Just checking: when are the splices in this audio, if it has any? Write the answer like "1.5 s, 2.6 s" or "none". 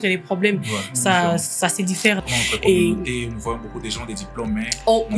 2.2 s